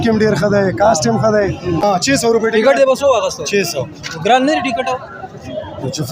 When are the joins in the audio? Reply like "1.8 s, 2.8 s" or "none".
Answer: 1.8 s